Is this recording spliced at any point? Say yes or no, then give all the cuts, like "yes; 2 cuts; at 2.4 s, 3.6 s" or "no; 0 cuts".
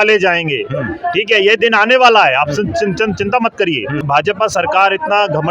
yes; 1 cut; at 4.0 s